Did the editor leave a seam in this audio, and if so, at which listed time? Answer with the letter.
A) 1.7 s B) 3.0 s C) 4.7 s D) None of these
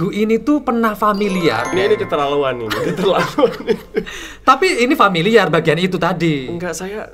A